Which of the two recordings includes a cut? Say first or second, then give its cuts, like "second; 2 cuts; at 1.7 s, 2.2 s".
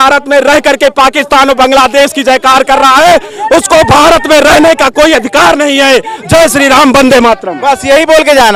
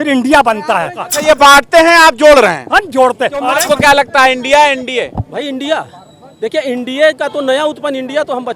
second; 2 cuts; at 1.1 s, 3.5 s